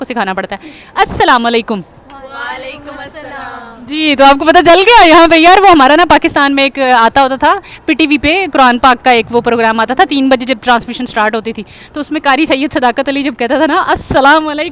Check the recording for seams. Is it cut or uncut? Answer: uncut